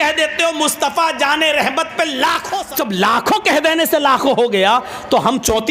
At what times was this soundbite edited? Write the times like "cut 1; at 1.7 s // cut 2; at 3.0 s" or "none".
cut 1; at 2.5 s

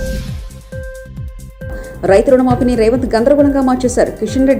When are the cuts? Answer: none

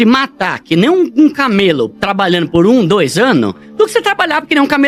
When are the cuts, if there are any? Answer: none

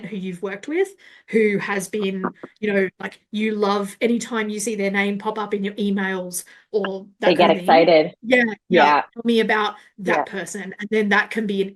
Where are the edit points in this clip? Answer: none

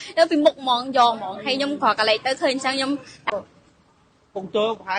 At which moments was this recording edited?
cut 1; at 3.3 s

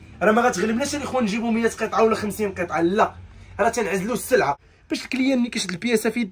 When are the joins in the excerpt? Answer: cut 1; at 4.6 s

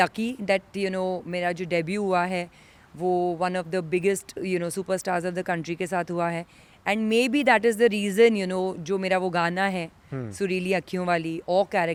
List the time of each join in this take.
none

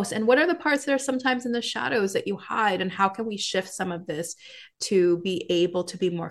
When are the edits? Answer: none

